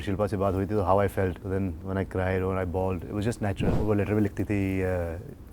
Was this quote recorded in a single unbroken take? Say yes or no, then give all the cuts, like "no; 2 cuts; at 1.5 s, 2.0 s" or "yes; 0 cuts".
no; 2 cuts; at 1.4 s, 3.6 s